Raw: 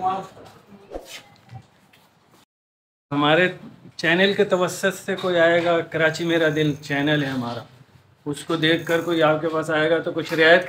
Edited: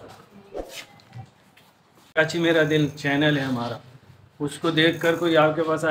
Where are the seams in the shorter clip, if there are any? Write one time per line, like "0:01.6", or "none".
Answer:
0:02.2